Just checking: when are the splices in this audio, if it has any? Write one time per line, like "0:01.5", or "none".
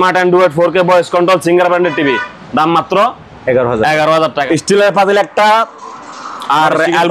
0:04.4

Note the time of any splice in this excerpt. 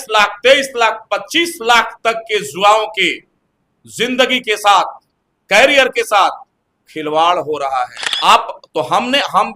0:08.0

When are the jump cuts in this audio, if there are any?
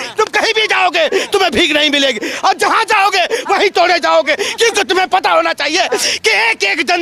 none

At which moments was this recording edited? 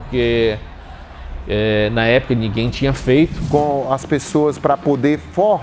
0:03.4

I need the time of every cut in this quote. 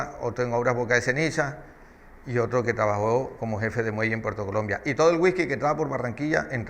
0:04.7

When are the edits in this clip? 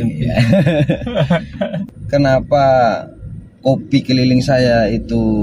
0:01.8

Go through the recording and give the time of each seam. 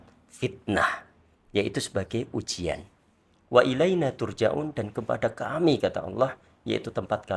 none

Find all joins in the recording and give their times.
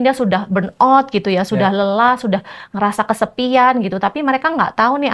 none

